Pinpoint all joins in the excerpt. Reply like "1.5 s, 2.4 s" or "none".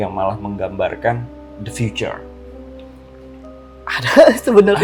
none